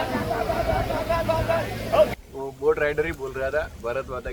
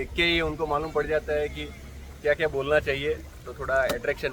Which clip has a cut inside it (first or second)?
first